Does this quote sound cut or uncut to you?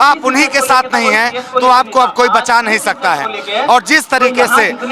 uncut